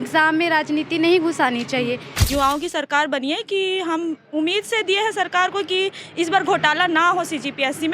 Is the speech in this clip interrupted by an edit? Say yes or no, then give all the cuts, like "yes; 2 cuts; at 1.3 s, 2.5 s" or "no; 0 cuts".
yes; 1 cut; at 2.3 s